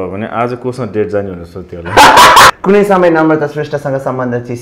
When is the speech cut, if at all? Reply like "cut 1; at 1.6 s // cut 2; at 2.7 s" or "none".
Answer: cut 1; at 2.5 s

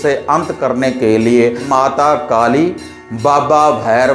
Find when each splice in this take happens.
cut 1; at 1.6 s

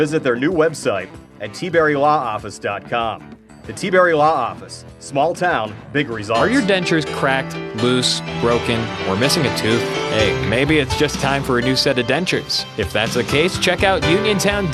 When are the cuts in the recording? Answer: cut 1; at 6.4 s

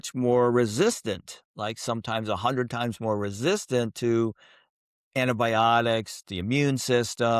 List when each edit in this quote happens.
none

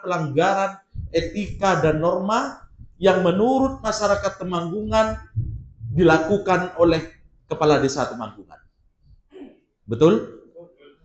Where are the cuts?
none

